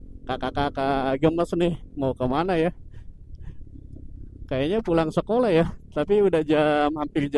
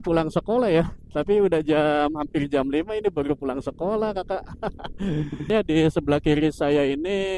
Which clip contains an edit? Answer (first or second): second